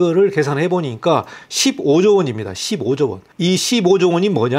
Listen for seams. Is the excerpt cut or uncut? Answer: uncut